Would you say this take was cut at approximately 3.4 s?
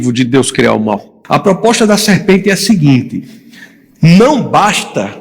no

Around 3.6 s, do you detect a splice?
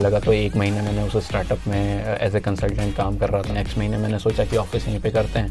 yes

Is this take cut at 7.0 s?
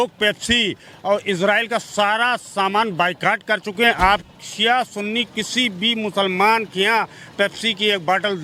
no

